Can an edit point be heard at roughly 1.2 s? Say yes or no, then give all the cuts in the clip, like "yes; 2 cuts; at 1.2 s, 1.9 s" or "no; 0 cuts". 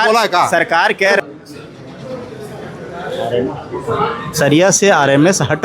yes; 1 cut; at 1.2 s